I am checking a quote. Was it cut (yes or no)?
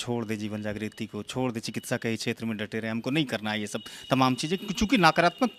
no